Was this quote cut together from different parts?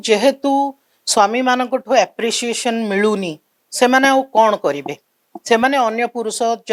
no; 0 cuts

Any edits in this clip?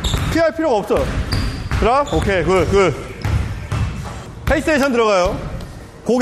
yes; 2 cuts; at 3.2 s, 4.3 s

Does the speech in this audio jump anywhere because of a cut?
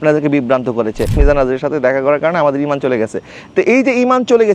yes; 1 cut; at 1.1 s

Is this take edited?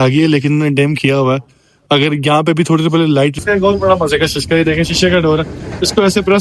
yes; 1 cut; at 3.4 s

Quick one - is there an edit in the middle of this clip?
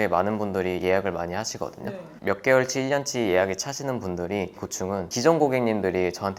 yes; 2 cuts; at 2.1 s, 5.1 s

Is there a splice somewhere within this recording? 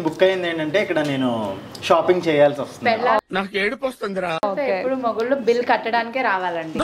no; 0 cuts

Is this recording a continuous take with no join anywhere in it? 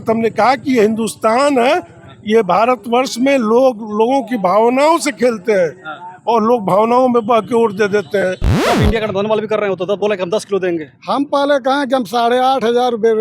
no; 1 cut; at 8.6 s

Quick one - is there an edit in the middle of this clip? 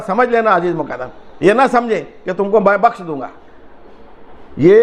no; 0 cuts

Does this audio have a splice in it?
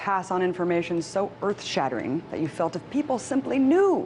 no; 0 cuts

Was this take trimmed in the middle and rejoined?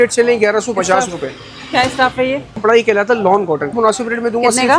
yes; 2 cuts; at 2.6 s, 3.7 s

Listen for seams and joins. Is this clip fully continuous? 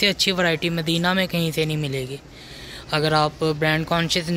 yes; 0 cuts

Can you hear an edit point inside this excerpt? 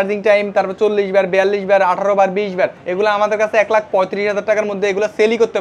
yes; 1 cut; at 2.8 s

